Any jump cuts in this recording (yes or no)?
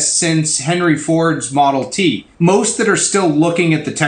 yes